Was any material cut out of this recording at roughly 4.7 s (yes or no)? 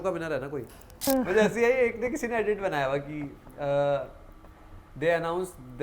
no